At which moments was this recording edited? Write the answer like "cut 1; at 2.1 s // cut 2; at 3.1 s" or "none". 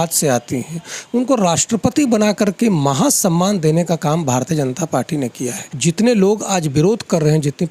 cut 1; at 5.7 s